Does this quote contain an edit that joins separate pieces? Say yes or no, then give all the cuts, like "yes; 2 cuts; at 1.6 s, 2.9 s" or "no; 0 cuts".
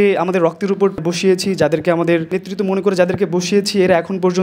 yes; 2 cuts; at 1.0 s, 2.3 s